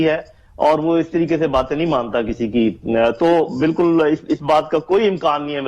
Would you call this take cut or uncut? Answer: uncut